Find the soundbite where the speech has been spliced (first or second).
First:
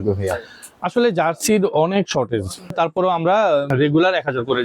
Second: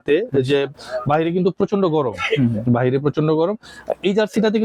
first